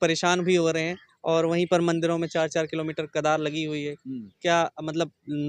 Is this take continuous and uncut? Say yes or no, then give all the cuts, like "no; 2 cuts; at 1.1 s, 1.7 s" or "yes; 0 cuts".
yes; 0 cuts